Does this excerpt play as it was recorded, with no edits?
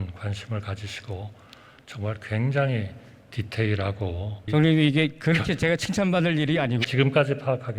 no; 1 cut; at 6.8 s

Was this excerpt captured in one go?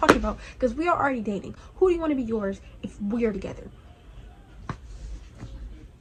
yes; 0 cuts

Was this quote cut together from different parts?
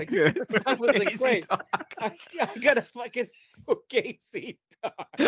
no; 0 cuts

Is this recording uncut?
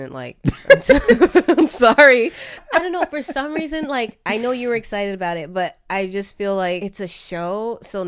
no; 2 cuts; at 2.6 s, 6.8 s

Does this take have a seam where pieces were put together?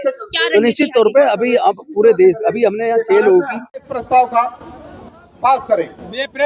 yes; 1 cut; at 3.8 s

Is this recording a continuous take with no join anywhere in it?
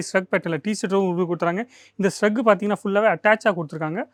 yes; 0 cuts

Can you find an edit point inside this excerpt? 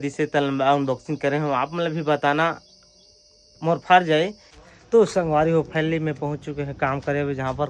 yes; 1 cut; at 4.7 s

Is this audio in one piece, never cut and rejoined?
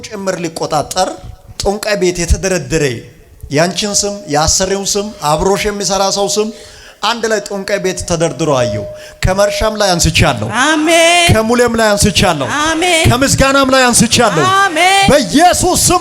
yes; 0 cuts

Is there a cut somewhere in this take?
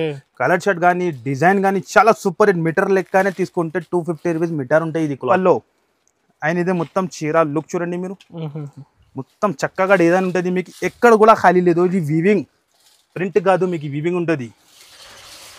yes; 1 cut; at 5.2 s

